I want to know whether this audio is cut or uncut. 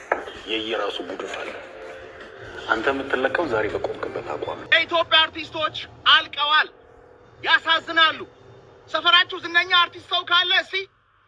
cut